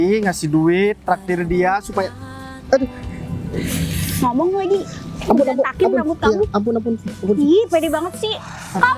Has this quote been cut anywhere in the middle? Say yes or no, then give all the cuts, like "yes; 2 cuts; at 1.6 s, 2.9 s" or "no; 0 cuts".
no; 0 cuts